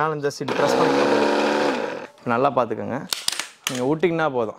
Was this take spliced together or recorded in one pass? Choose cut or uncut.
cut